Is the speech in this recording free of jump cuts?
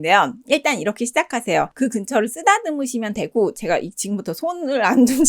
no; 1 cut; at 1.7 s

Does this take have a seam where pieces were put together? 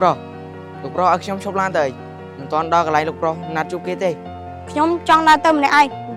no; 0 cuts

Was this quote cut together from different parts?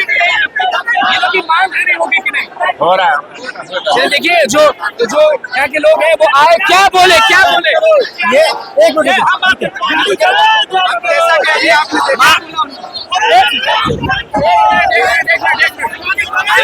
no; 0 cuts

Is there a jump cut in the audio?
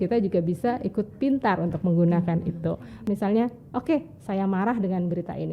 yes; 1 cut; at 3.1 s

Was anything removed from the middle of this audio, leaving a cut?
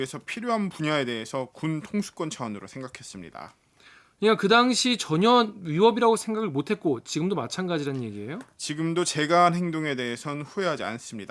no; 0 cuts

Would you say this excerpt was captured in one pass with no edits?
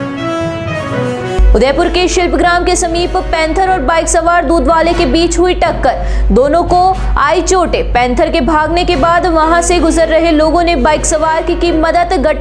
no; 1 cut; at 1.3 s

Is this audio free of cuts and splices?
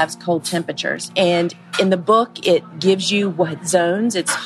no; 1 cut; at 1.1 s

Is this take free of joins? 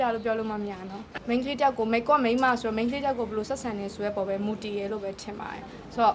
no; 1 cut; at 1.1 s

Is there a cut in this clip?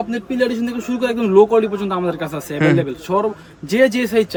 no; 0 cuts

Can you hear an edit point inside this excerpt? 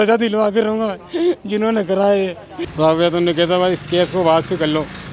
yes; 1 cut; at 2.5 s

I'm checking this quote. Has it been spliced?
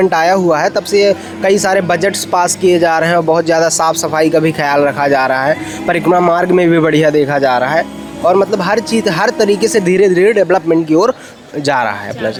no; 0 cuts

